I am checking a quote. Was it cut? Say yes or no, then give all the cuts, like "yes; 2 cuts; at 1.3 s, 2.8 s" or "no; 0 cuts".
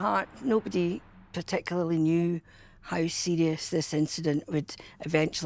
no; 0 cuts